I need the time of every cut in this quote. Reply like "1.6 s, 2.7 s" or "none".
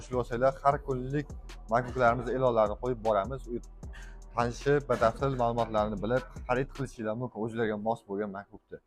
none